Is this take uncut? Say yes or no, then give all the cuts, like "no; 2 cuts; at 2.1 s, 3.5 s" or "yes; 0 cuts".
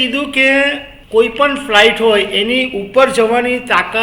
no; 1 cut; at 0.9 s